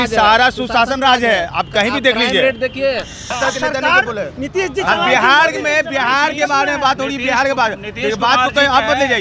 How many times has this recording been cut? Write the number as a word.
one